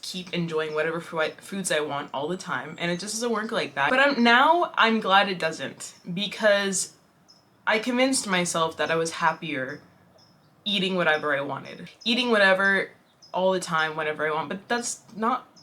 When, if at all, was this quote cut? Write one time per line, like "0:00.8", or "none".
0:03.9
0:11.8